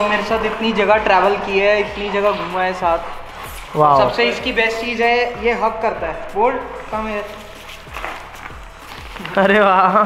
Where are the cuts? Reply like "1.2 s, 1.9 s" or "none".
none